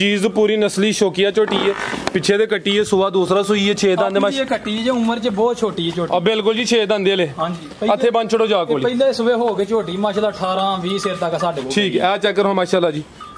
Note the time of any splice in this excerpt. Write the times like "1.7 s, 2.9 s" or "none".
none